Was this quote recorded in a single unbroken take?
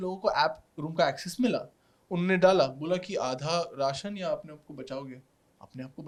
yes; 0 cuts

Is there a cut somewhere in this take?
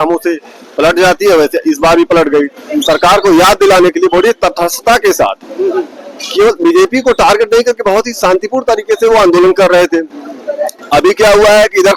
no; 0 cuts

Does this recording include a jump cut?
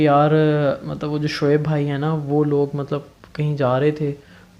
no; 0 cuts

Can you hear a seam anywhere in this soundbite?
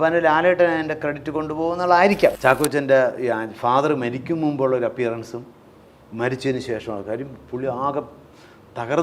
yes; 1 cut; at 2.4 s

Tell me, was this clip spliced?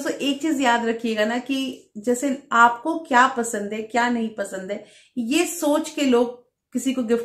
no; 0 cuts

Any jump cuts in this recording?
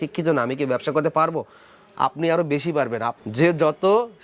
yes; 1 cut; at 3.1 s

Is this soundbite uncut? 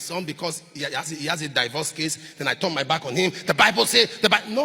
yes; 0 cuts

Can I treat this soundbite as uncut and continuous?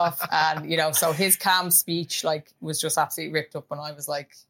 yes; 0 cuts

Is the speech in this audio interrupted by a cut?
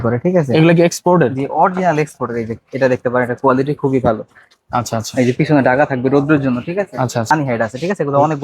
yes; 1 cut; at 7.3 s

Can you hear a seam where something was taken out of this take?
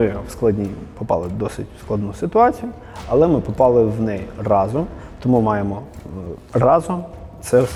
no; 0 cuts

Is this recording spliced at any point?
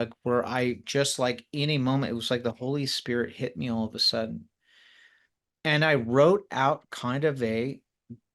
no; 0 cuts

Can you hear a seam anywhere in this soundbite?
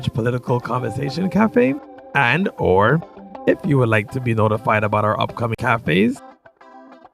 yes; 1 cut; at 5.6 s

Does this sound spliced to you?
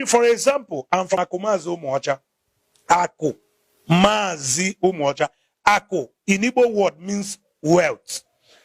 yes; 1 cut; at 1.1 s

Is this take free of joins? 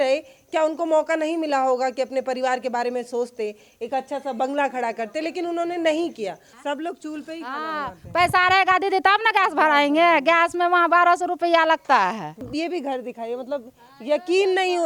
no; 2 cuts; at 6.5 s, 12.5 s

